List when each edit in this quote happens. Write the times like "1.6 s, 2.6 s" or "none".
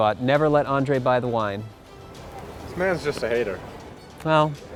none

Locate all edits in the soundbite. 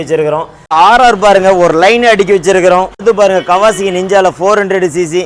0.7 s, 3.0 s

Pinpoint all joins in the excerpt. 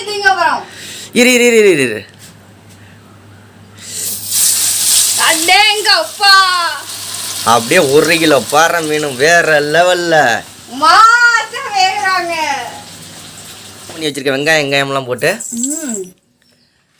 14.0 s

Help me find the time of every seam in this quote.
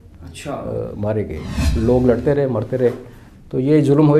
1.6 s

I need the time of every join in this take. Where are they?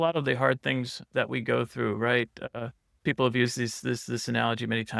1.0 s, 2.9 s

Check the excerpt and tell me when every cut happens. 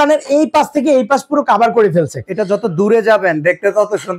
none

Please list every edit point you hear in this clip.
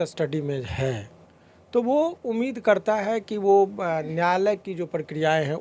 none

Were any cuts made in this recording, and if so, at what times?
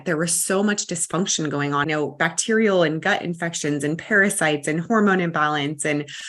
1.8 s

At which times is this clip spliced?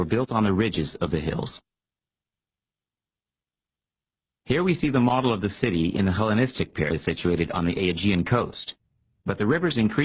none

